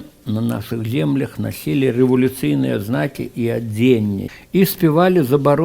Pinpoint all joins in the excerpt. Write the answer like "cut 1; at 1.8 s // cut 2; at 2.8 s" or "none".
cut 1; at 4.3 s